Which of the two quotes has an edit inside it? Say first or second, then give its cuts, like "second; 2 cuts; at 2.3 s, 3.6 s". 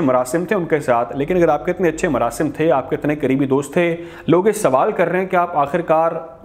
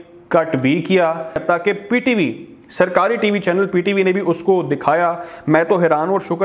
second; 1 cut; at 1.4 s